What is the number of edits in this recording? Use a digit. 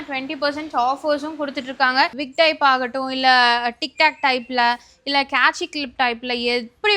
1